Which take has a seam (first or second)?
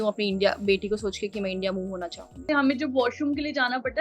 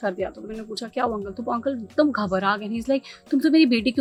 first